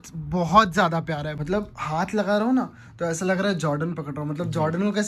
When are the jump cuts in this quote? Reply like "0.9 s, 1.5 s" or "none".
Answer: 1.3 s